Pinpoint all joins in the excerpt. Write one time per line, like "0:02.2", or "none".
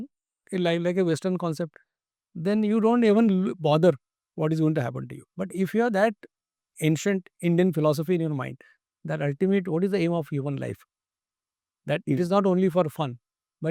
none